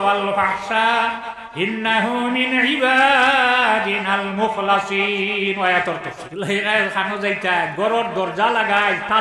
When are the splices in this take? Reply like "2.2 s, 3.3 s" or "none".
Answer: 6.2 s